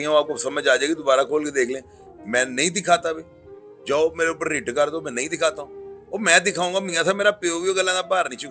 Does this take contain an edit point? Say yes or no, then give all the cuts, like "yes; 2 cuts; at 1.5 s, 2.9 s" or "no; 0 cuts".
no; 0 cuts